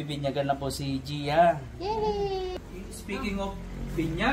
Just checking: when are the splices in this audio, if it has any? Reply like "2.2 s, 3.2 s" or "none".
2.5 s